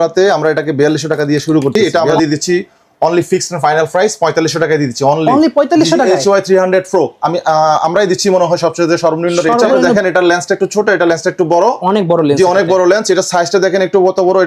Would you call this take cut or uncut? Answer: cut